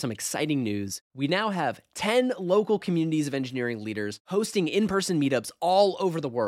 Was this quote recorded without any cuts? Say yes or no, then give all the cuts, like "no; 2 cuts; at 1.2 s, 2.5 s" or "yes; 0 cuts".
yes; 0 cuts